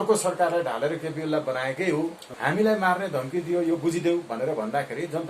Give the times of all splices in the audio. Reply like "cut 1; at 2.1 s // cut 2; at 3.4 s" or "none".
cut 1; at 2.3 s